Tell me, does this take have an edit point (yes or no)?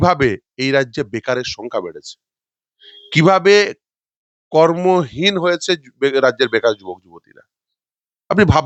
no